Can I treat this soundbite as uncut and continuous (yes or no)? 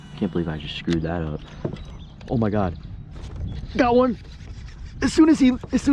yes